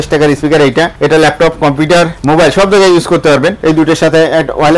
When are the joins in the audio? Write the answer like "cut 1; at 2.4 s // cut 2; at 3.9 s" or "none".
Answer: cut 1; at 0.9 s // cut 2; at 2.2 s // cut 3; at 3.6 s

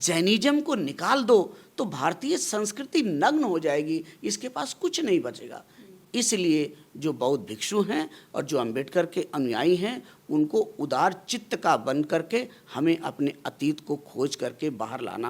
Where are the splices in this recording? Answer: none

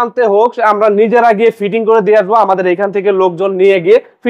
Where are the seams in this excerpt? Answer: none

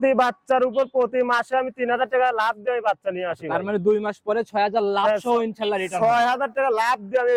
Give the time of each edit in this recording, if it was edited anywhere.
none

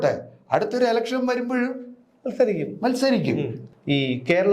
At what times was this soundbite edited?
cut 1; at 3.6 s

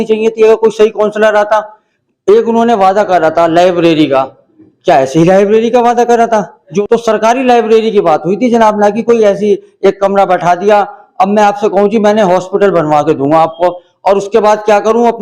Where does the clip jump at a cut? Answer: cut 1; at 1.9 s // cut 2; at 6.7 s

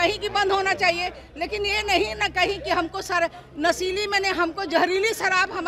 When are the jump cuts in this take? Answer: none

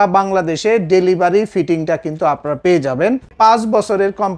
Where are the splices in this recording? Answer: cut 1; at 3.3 s

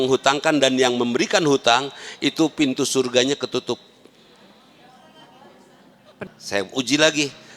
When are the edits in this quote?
cut 1; at 6.2 s

